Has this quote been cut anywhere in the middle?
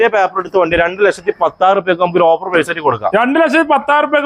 no; 0 cuts

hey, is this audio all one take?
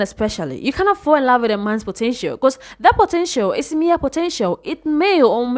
yes; 0 cuts

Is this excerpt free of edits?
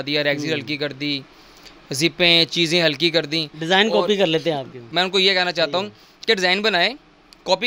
no; 1 cut; at 4.8 s

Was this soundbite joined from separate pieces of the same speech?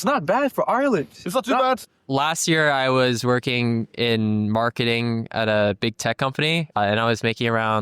yes; 2 cuts; at 1.8 s, 6.7 s

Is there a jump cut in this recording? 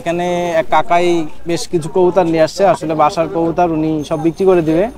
no; 0 cuts

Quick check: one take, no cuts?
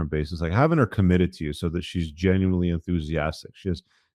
yes; 0 cuts

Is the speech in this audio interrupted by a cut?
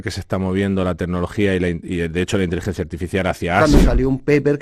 yes; 1 cut; at 3.6 s

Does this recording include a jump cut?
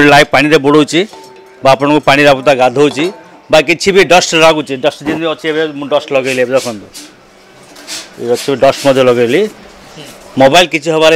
no; 0 cuts

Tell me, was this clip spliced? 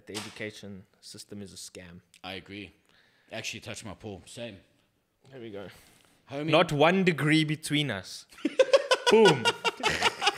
no; 0 cuts

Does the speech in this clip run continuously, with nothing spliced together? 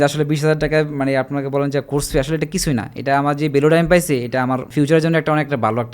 no; 1 cut; at 4.7 s

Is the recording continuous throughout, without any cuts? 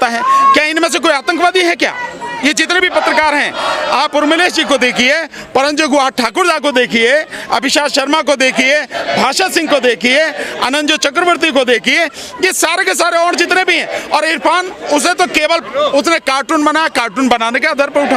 yes; 0 cuts

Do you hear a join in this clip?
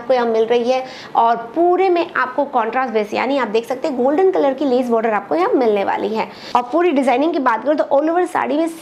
yes; 1 cut; at 6.4 s

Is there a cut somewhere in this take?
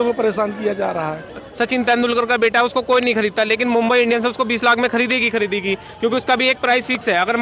yes; 1 cut; at 1.4 s

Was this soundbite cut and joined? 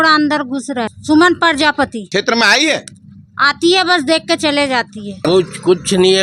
yes; 3 cuts; at 0.9 s, 2.0 s, 5.2 s

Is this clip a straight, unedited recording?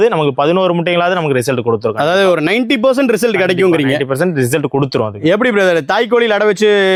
yes; 0 cuts

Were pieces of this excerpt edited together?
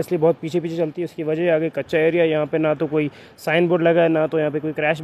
no; 0 cuts

